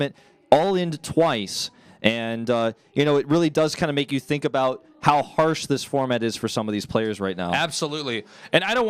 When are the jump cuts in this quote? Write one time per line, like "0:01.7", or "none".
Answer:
0:06.5